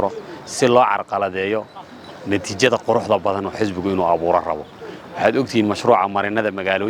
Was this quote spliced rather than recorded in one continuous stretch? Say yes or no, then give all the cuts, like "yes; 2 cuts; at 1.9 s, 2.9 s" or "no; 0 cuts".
no; 0 cuts